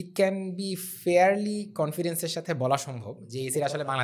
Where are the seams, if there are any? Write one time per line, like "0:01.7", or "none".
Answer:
none